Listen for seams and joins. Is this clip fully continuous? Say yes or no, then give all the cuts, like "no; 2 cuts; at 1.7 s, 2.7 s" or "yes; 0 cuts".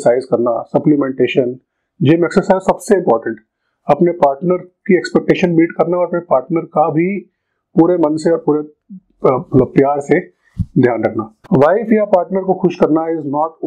no; 1 cut; at 11.3 s